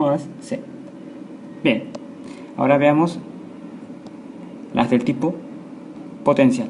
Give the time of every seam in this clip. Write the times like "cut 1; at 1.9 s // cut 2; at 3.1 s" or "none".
none